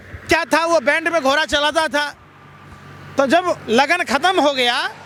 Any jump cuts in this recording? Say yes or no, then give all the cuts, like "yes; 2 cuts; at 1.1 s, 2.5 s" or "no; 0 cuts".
no; 0 cuts